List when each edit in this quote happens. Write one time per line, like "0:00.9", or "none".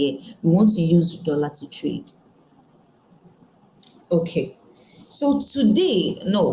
none